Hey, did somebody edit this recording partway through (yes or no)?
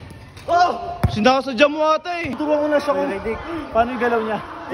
yes